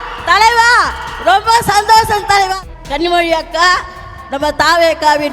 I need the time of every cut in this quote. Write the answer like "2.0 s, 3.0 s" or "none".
2.5 s